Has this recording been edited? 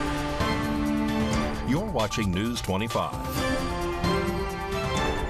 no; 0 cuts

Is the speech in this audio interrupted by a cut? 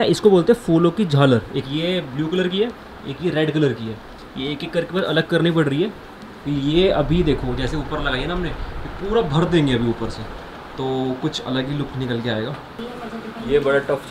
no; 0 cuts

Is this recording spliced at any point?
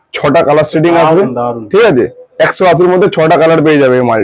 no; 0 cuts

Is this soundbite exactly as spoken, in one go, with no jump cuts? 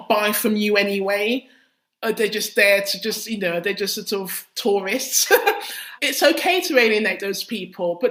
yes; 0 cuts

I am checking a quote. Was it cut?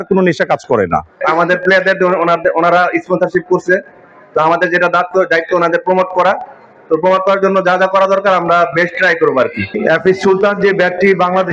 yes; 2 cuts; at 1.1 s, 9.7 s

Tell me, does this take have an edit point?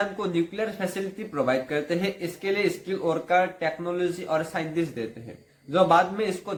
no; 0 cuts

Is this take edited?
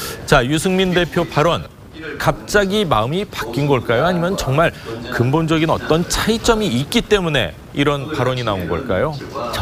yes; 1 cut; at 3.1 s

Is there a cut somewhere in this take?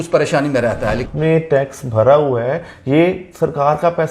yes; 1 cut; at 1.0 s

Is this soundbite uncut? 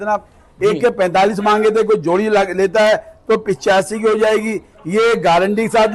yes; 0 cuts

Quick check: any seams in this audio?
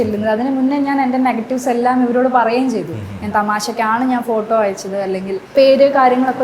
yes; 1 cut; at 5.4 s

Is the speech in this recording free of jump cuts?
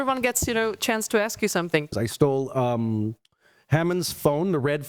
no; 1 cut; at 1.9 s

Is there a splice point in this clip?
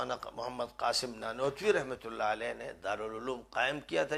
no; 0 cuts

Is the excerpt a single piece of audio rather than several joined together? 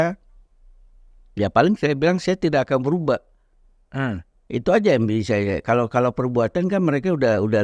yes; 0 cuts

